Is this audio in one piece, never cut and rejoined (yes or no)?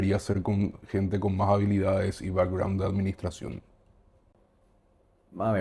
yes